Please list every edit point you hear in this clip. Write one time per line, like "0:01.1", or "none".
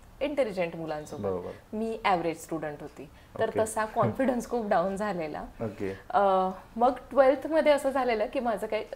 none